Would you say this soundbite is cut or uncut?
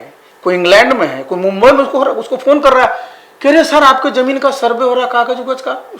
uncut